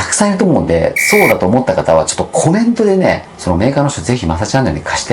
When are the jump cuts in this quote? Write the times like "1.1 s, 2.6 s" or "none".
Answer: 3.3 s